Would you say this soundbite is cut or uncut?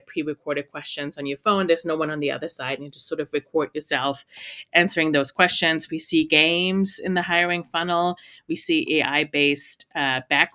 uncut